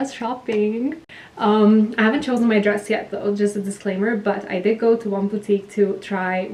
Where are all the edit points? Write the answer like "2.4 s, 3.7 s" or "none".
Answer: none